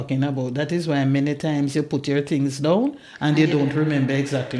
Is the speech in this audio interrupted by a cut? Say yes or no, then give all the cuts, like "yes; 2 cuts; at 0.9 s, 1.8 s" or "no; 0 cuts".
no; 0 cuts